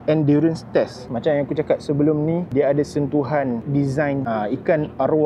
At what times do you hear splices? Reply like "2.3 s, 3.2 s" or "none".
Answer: 1.0 s, 4.2 s